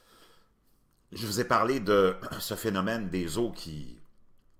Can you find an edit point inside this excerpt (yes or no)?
no